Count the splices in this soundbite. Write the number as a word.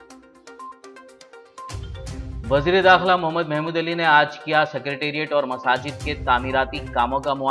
one